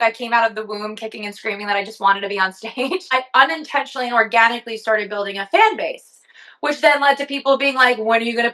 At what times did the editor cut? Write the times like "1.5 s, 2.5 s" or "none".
3.0 s